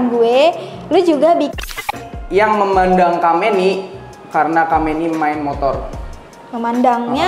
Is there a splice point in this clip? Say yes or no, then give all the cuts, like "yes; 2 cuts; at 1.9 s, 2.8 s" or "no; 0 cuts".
yes; 1 cut; at 1.7 s